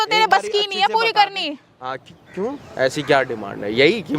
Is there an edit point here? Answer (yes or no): no